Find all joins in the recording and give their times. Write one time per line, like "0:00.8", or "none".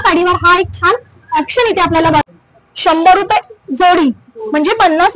0:02.2